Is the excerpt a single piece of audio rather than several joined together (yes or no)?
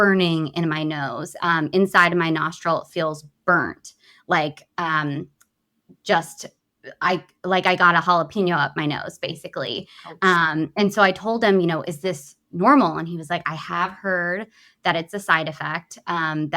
yes